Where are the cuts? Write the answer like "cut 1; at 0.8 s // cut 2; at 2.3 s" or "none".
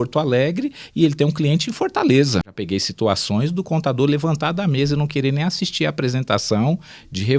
cut 1; at 2.6 s